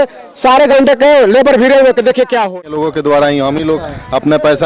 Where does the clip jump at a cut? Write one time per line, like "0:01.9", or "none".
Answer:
0:02.6

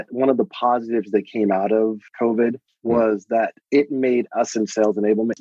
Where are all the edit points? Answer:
none

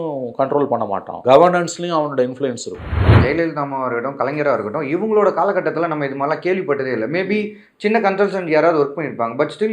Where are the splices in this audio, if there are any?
0:01.1
0:03.2

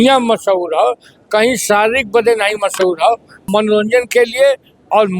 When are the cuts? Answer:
0:03.4

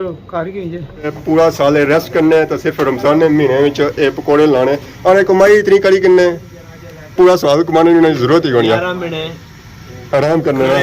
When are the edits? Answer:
0:01.1

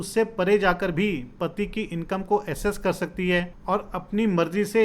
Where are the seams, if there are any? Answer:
0:03.5

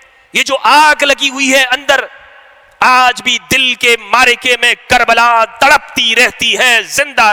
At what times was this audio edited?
none

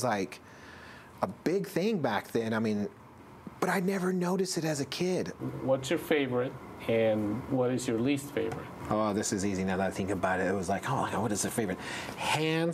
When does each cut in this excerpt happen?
0:03.1
0:05.3
0:08.7

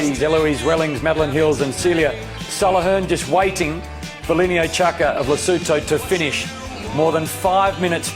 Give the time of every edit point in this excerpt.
none

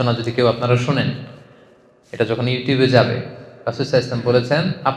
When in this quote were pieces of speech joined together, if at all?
none

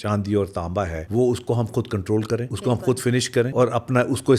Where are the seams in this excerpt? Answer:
0:01.0
0:02.5
0:03.5

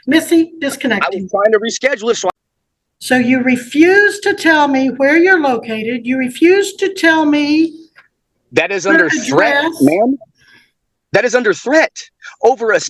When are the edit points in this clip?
0:02.4

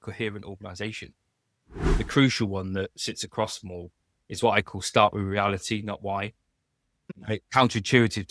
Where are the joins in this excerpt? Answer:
0:01.8
0:07.0

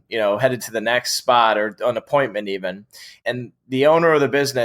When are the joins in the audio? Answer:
0:03.2

